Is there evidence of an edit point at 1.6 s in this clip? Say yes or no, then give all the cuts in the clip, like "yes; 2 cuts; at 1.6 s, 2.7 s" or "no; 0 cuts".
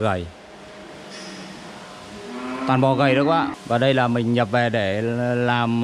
no; 1 cut; at 3.6 s